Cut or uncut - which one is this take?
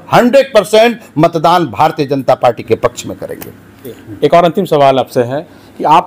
uncut